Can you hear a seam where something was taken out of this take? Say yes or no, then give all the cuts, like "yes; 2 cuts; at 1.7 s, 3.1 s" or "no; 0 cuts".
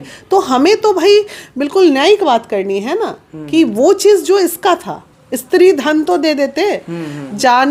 no; 0 cuts